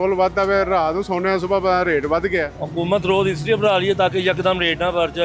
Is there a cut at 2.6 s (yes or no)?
yes